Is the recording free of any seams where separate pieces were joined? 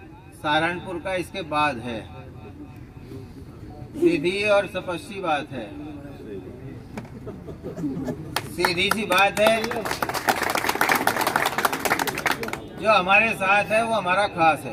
yes; 0 cuts

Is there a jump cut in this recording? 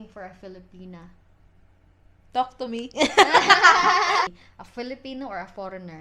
yes; 1 cut; at 4.3 s

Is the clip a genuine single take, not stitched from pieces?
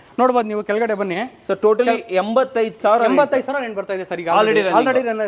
yes; 0 cuts

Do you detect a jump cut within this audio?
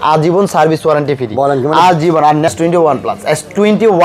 yes; 1 cut; at 2.5 s

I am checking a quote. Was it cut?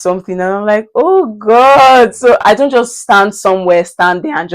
yes; 1 cut; at 2.4 s

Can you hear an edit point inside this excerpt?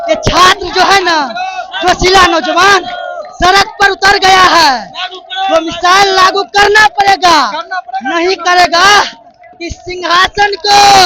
no; 0 cuts

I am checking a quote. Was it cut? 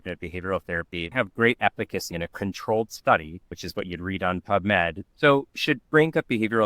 yes; 4 cuts; at 1.1 s, 2.1 s, 3.6 s, 5.0 s

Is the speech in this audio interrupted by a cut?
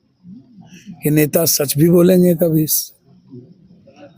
no; 0 cuts

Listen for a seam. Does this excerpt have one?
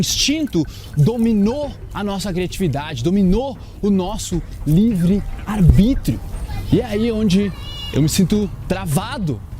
yes; 2 cuts; at 1.8 s, 5.4 s

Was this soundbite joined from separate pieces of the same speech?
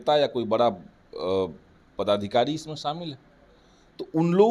no; 0 cuts

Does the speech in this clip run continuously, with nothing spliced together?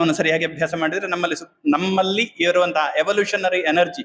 yes; 0 cuts

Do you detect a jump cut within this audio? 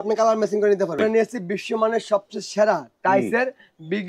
yes; 1 cut; at 1.0 s

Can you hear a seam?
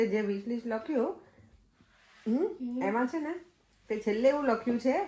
no; 0 cuts

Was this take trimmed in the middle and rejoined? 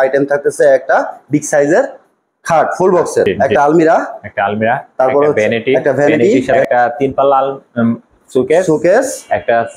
yes; 2 cuts; at 3.3 s, 6.6 s

